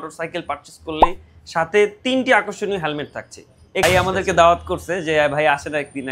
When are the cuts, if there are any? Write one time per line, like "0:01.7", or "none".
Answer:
0:03.8